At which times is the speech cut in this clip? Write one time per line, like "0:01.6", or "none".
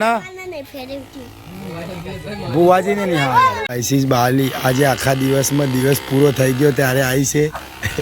0:03.7